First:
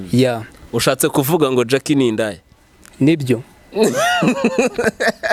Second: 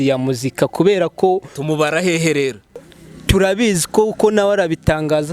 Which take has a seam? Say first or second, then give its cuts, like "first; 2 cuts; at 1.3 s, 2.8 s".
second; 1 cut; at 2.8 s